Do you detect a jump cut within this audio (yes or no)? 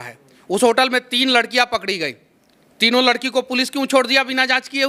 no